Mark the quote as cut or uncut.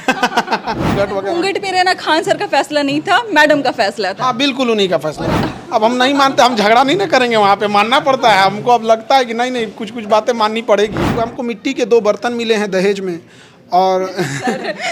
cut